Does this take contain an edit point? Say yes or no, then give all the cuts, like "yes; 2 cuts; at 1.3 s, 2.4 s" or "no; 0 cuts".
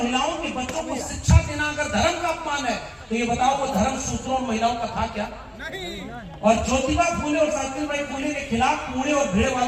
no; 0 cuts